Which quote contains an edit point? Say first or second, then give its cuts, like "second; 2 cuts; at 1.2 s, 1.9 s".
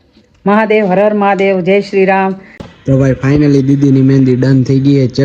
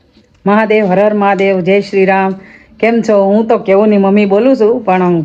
first; 1 cut; at 2.7 s